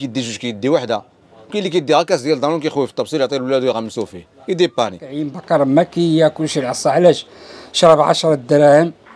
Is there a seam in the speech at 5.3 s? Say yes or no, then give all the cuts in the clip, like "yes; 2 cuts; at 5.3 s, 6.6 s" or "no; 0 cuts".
yes; 1 cut; at 5.3 s